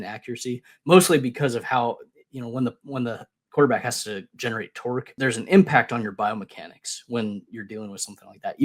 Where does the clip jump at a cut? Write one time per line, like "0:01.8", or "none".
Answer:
0:05.1